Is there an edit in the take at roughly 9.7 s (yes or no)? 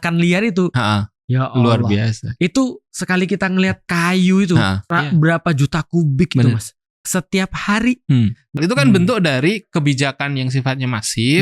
no